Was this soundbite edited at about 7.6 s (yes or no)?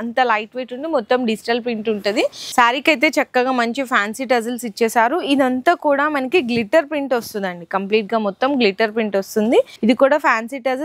no